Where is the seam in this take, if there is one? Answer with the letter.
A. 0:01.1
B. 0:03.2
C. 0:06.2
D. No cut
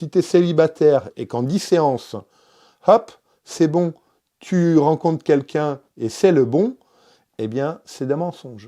A